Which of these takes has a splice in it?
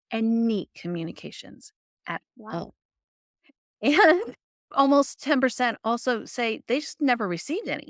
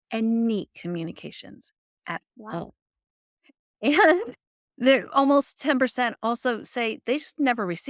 first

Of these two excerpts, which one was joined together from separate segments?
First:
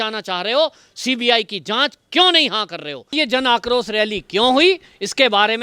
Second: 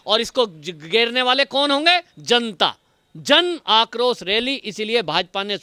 first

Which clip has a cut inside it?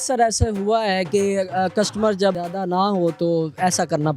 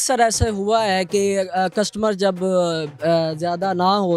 first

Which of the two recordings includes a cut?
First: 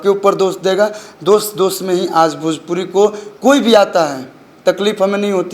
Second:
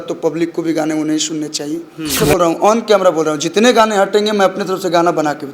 second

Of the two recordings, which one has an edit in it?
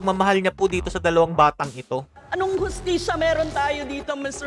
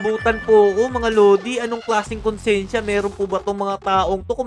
first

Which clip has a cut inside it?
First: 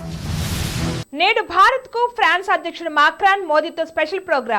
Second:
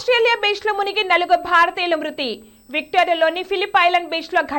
first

